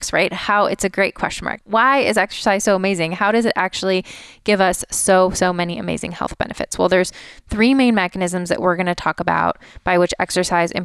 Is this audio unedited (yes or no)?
no